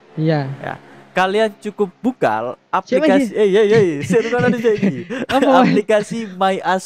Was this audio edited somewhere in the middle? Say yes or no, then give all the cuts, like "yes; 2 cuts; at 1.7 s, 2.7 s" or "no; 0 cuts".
no; 0 cuts